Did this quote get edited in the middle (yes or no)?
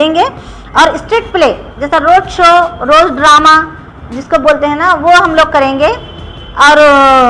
no